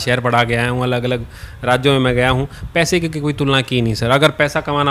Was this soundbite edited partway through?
no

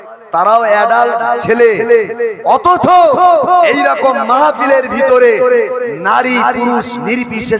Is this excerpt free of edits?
yes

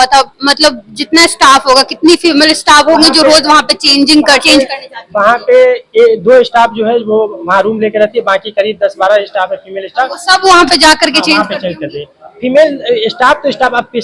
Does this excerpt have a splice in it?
no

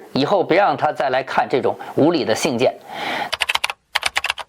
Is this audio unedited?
no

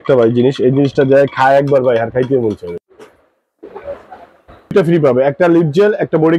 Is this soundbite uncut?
no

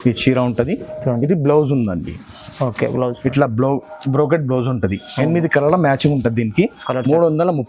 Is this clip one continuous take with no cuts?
yes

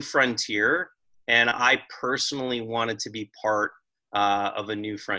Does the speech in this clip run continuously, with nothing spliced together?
yes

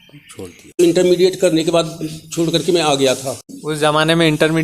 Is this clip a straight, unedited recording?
no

